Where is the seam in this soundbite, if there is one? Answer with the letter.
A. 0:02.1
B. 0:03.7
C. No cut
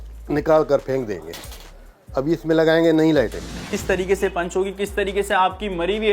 B